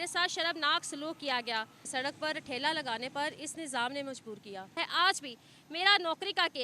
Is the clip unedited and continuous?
no; 2 cuts; at 1.9 s, 4.8 s

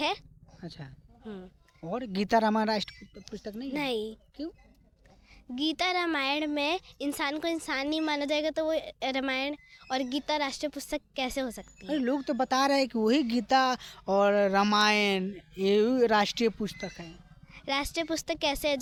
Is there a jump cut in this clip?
no; 0 cuts

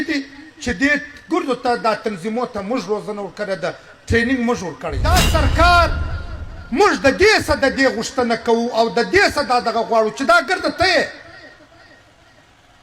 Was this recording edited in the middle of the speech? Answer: yes; 1 cut; at 5.0 s

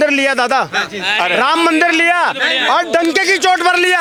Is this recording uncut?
yes; 0 cuts

